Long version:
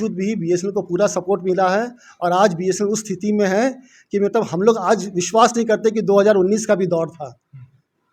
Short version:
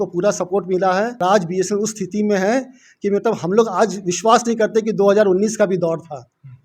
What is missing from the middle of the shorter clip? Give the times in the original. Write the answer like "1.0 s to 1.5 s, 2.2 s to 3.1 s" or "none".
2.0 s to 2.3 s

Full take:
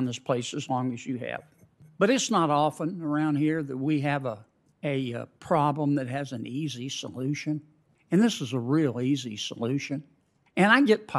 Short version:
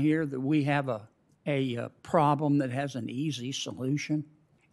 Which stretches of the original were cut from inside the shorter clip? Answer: none

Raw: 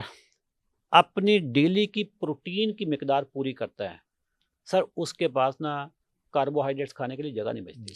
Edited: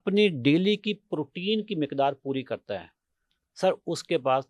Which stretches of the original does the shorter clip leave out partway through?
none

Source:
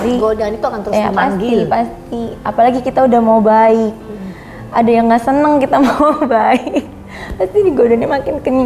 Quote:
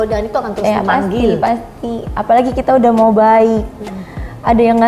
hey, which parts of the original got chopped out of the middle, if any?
none

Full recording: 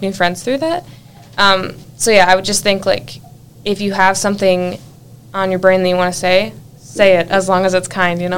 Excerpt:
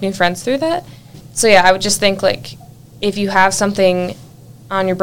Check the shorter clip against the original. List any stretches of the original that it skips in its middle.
1.2 s to 1.8 s

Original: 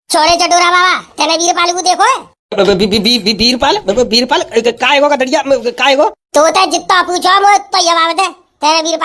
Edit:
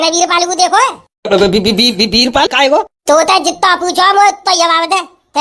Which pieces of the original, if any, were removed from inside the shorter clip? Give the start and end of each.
3.8 s to 5.8 s

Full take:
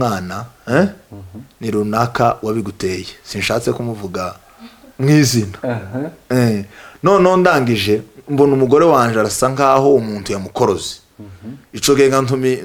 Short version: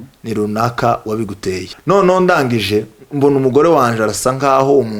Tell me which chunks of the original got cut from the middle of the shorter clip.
3.1 s to 6.9 s

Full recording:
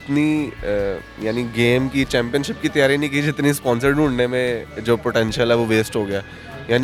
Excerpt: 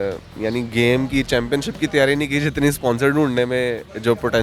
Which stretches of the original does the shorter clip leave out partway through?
none

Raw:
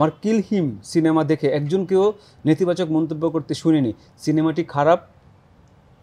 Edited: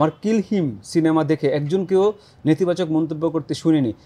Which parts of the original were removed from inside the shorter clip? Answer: none

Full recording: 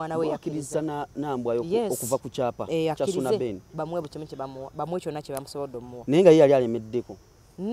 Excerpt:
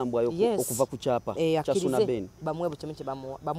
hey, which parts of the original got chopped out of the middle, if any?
none

